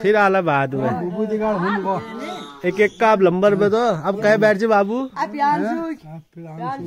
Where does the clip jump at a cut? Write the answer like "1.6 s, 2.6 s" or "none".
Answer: none